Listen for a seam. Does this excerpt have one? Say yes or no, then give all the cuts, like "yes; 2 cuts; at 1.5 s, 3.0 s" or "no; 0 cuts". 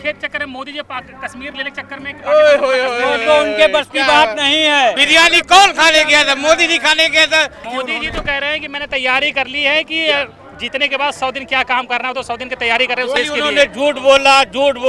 yes; 3 cuts; at 5.0 s, 7.6 s, 13.2 s